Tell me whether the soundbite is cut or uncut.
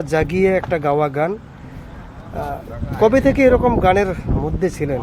uncut